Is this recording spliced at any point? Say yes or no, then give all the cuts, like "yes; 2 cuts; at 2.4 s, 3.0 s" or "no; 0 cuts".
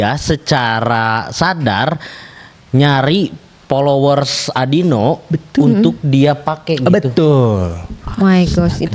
no; 0 cuts